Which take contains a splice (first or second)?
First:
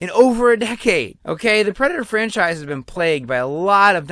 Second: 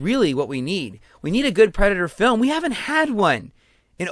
first